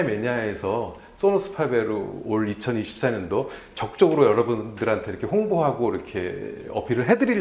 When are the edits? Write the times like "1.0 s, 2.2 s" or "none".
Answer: none